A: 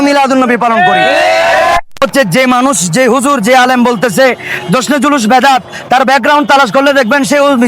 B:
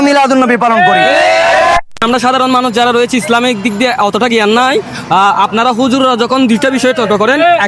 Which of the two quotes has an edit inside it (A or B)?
A